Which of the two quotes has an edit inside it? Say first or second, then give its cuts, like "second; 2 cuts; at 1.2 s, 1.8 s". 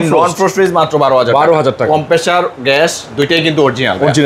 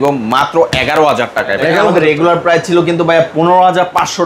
second; 1 cut; at 1.9 s